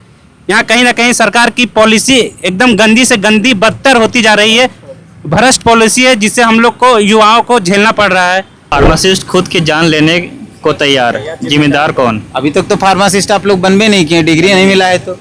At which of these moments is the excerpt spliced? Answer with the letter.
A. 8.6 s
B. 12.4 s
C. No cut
A